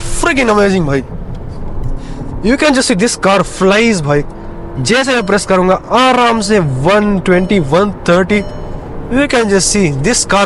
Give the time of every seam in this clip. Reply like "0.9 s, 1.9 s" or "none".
1.8 s